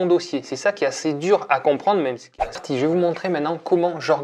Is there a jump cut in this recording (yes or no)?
yes